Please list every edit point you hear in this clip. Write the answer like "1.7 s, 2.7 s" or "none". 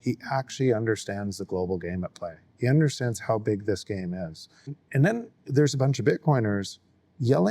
4.8 s

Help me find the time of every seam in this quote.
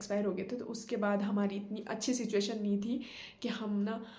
none

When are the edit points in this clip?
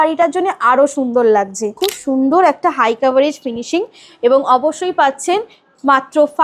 1.8 s

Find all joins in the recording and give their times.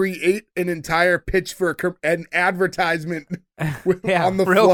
none

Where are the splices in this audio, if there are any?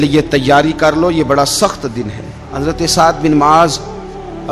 2.5 s

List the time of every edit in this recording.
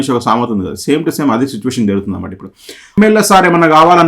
3.0 s

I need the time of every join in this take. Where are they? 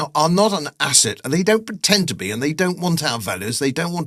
none

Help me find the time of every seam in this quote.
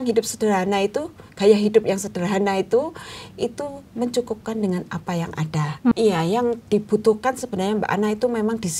5.9 s

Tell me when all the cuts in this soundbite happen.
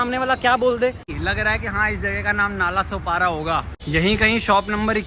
1.1 s, 3.8 s

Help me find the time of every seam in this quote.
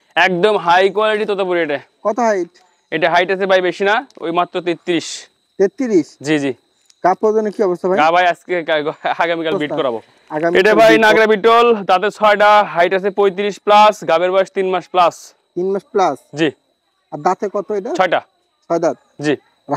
10.5 s

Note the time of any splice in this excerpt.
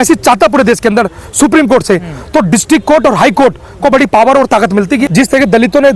5.1 s

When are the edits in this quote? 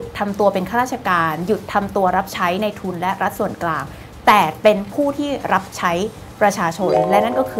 none

